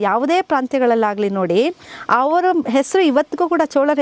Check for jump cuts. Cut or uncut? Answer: uncut